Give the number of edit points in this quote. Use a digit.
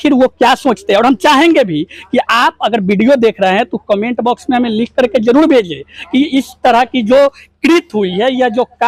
0